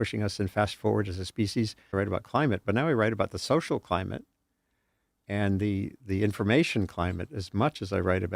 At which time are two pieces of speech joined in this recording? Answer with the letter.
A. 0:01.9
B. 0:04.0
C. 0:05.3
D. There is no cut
A